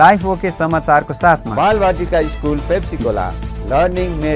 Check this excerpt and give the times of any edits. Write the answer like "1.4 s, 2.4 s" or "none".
1.5 s